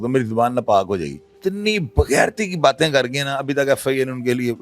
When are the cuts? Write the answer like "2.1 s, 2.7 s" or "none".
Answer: 1.2 s

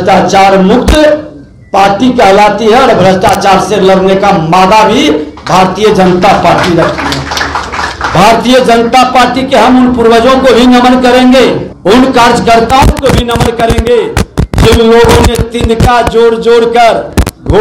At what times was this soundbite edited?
none

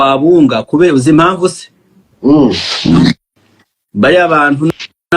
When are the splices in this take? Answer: none

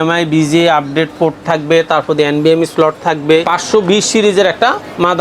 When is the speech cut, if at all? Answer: 3.5 s

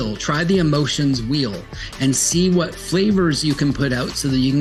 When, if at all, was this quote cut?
none

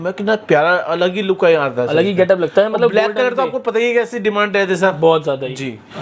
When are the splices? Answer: none

